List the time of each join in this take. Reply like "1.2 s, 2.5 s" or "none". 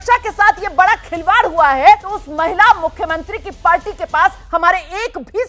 2.1 s